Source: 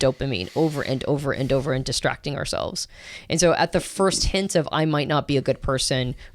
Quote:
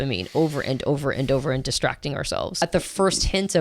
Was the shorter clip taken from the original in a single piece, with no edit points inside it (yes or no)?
no